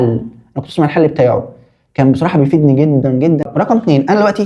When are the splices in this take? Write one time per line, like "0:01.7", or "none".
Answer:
0:03.4